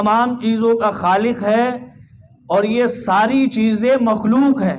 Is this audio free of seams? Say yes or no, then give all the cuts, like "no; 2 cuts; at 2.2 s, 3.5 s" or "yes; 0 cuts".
yes; 0 cuts